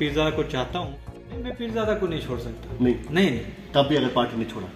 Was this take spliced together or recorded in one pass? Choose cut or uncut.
cut